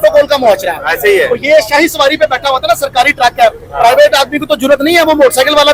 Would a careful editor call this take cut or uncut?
uncut